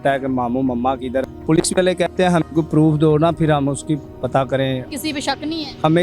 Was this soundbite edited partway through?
yes; 2 cuts; at 1.2 s, 4.9 s

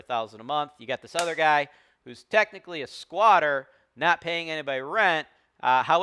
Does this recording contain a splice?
no; 0 cuts

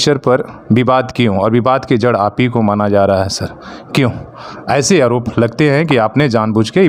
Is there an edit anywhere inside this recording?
no; 0 cuts

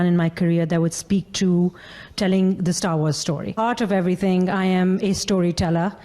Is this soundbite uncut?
no; 1 cut; at 3.5 s

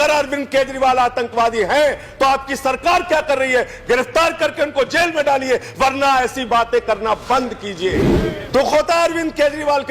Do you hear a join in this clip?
yes; 1 cut; at 8.1 s

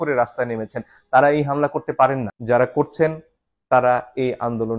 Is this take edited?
yes; 1 cut; at 2.3 s

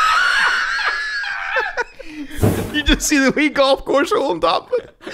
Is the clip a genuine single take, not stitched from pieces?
no; 1 cut; at 2.4 s

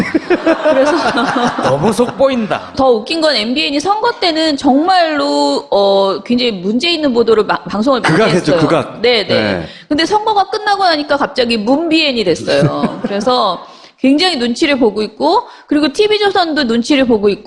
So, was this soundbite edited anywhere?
no; 0 cuts

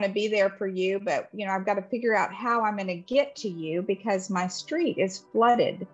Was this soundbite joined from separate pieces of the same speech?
no; 0 cuts

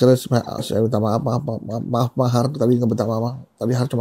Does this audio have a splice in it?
no; 0 cuts

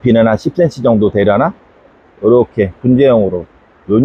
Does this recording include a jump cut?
no; 0 cuts

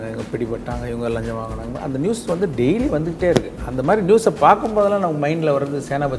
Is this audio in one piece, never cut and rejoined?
yes; 0 cuts

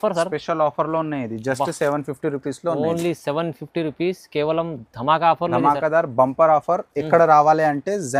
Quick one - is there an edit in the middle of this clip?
no; 0 cuts

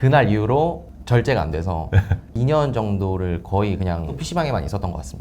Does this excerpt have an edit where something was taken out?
yes; 3 cuts; at 0.9 s, 2.3 s, 4.2 s

